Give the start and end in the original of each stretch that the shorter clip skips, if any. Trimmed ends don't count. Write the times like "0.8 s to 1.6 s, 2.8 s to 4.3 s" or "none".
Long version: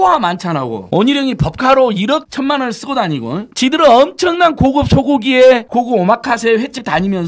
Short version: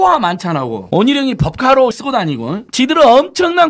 2.0 s to 2.8 s